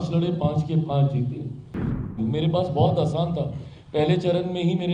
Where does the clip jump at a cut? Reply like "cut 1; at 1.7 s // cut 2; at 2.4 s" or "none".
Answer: cut 1; at 2.1 s

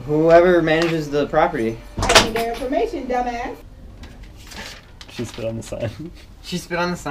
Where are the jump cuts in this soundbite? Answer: cut 1; at 3.7 s

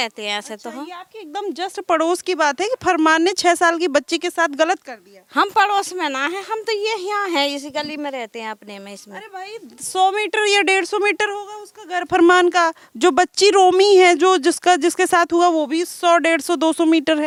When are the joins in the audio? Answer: none

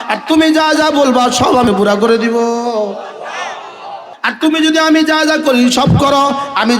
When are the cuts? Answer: cut 1; at 1.7 s // cut 2; at 4.0 s

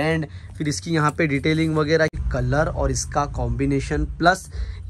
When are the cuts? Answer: cut 1; at 2.1 s

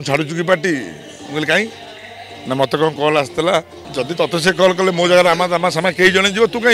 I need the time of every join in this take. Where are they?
cut 1; at 3.8 s

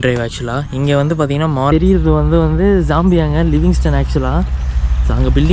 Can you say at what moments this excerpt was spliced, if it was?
cut 1; at 1.7 s

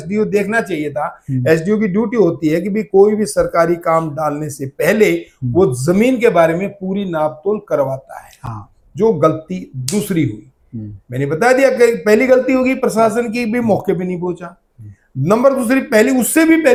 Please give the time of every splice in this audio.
none

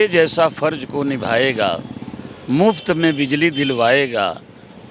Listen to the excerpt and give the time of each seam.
none

